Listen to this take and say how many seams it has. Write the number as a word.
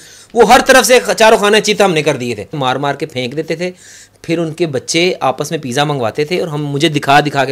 one